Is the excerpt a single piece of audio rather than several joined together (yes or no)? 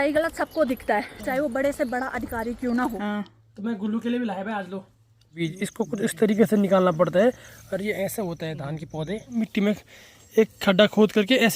no